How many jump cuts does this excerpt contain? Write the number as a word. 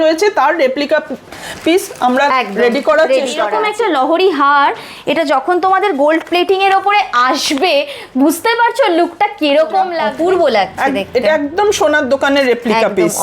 two